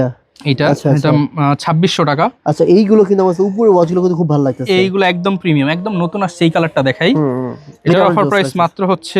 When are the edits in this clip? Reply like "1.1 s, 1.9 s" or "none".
none

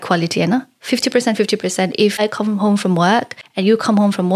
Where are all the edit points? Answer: 2.2 s, 3.4 s

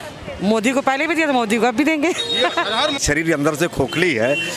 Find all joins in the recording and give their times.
3.0 s

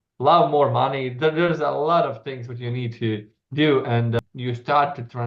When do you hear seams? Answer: 4.2 s

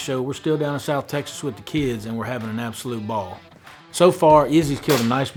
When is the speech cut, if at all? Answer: none

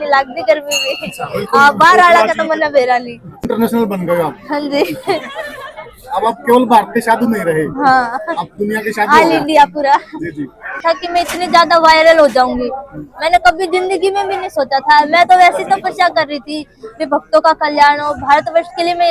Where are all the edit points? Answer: 3.5 s, 10.8 s

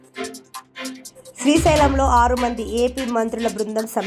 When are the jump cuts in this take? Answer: 1.0 s

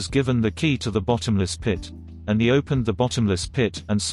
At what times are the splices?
2.1 s

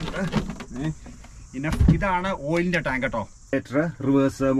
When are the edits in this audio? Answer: 3.5 s

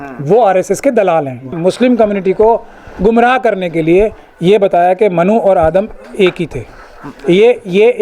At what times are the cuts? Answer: 1.5 s

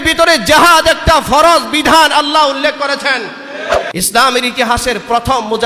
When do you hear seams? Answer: 3.9 s

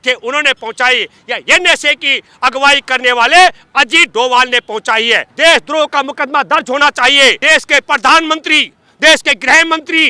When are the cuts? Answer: 5.3 s, 7.4 s

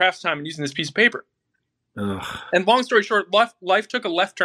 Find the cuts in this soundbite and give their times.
none

